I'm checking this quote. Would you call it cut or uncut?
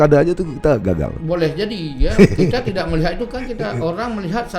uncut